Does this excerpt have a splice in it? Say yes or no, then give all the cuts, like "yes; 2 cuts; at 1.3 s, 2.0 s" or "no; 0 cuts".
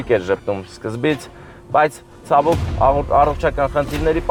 no; 0 cuts